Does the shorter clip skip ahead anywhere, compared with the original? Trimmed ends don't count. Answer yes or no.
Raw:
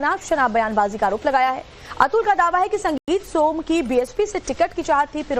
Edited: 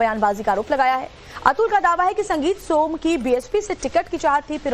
yes